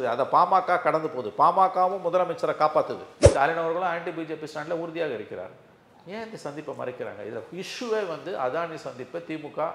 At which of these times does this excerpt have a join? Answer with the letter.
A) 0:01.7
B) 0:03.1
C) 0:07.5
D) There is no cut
B